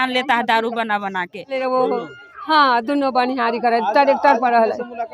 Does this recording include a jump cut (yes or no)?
yes